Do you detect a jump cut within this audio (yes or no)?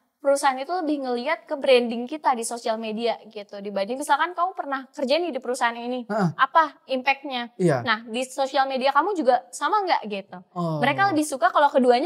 no